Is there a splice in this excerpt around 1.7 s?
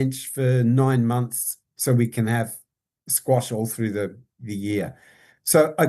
yes; 1 cut; at 1.7 s

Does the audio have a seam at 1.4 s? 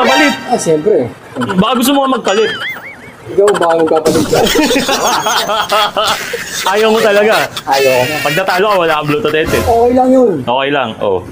yes; 1 cut; at 1.4 s

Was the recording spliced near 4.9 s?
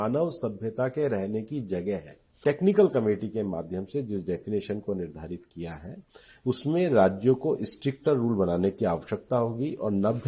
no; 1 cut; at 2.3 s

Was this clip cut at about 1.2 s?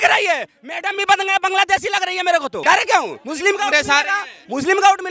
no; 1 cut; at 2.6 s

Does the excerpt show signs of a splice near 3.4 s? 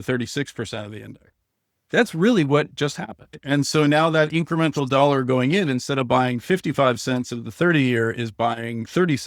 yes; 1 cut; at 3.4 s

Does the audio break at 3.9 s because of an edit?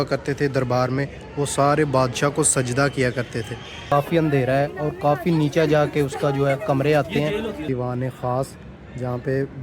yes; 2 cuts; at 3.9 s, 7.6 s

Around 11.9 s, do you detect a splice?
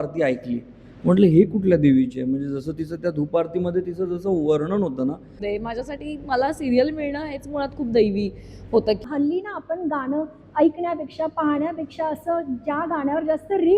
no; 2 cuts; at 5.3 s, 9.0 s

